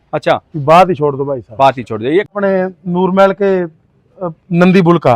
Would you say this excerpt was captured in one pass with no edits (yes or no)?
no